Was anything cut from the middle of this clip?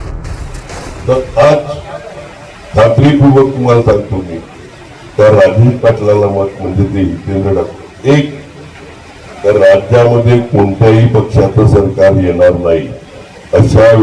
yes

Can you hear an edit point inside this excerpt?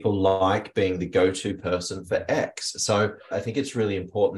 yes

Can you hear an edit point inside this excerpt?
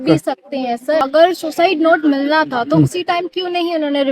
yes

